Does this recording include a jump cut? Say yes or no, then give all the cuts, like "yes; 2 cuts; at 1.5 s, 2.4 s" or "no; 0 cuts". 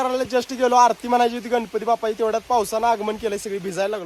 no; 0 cuts